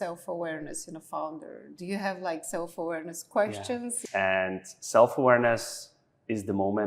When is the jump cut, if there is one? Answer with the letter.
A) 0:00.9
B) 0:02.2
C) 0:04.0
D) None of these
C